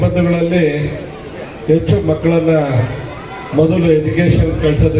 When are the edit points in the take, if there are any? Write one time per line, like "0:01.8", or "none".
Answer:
none